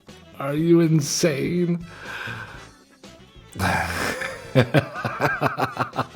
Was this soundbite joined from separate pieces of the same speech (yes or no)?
yes